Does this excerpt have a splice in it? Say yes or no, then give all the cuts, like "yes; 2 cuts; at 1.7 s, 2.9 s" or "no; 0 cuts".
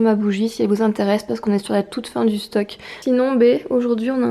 yes; 1 cut; at 3.0 s